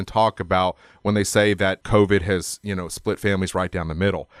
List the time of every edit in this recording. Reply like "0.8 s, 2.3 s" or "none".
1.8 s